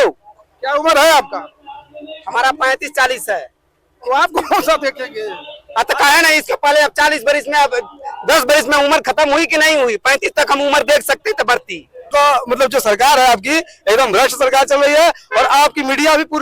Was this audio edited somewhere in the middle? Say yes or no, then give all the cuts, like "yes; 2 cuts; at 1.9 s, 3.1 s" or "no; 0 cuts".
yes; 1 cut; at 12.1 s